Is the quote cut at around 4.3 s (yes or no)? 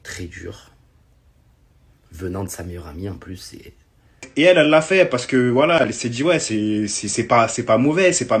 yes